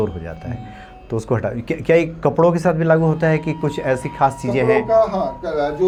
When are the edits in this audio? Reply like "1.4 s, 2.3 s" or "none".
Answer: none